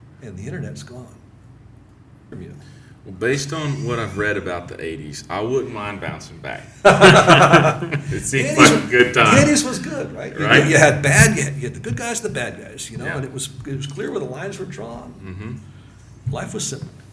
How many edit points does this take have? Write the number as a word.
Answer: one